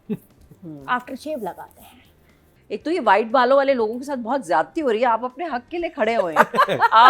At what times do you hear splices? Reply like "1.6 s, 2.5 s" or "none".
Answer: 2.5 s